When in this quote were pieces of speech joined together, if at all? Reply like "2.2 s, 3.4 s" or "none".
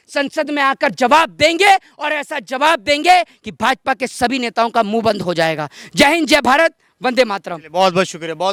none